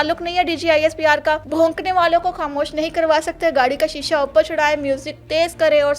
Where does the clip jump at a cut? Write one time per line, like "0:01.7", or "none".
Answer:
0:01.5